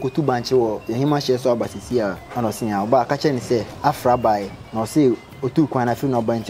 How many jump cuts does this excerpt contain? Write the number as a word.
three